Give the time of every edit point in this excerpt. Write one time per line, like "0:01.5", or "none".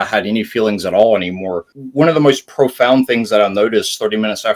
0:01.7